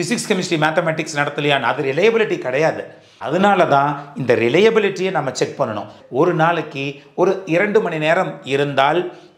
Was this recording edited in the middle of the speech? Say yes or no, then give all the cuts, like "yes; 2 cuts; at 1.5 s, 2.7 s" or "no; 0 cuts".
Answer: no; 0 cuts